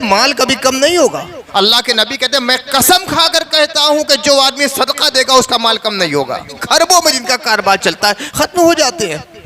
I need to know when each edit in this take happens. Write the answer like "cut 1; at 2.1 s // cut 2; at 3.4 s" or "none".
cut 1; at 1.4 s // cut 2; at 6.6 s